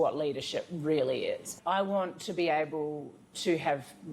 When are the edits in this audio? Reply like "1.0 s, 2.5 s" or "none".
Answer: 1.5 s